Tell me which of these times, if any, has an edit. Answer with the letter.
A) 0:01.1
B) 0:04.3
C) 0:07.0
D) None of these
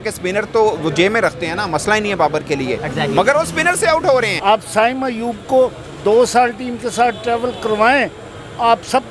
B